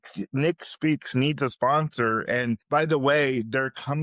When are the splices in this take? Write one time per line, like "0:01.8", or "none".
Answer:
0:02.6